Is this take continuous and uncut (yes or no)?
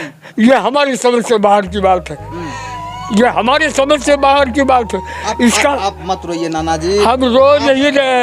yes